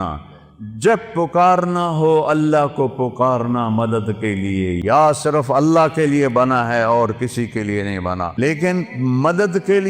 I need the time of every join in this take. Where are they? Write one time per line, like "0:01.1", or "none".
0:04.8
0:08.4